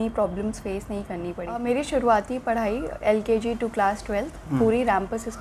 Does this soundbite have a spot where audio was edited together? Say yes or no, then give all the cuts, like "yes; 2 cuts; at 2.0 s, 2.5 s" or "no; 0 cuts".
yes; 1 cut; at 1.5 s